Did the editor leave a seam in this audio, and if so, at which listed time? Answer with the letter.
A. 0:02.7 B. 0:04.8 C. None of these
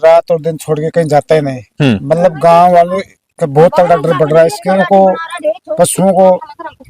B